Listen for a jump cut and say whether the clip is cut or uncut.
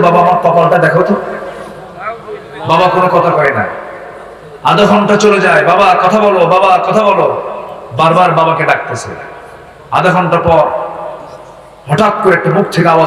uncut